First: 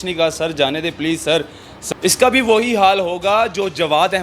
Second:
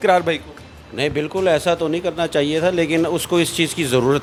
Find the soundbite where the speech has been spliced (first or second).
first